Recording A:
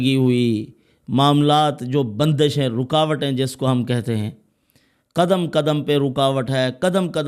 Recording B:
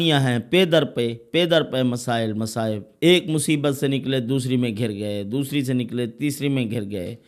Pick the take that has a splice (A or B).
B